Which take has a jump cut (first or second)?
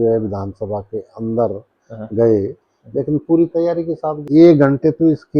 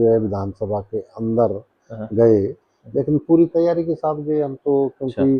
first